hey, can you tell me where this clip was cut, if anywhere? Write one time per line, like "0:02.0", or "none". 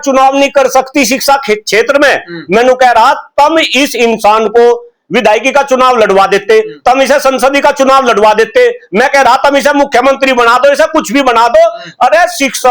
none